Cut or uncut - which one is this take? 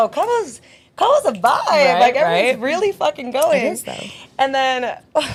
uncut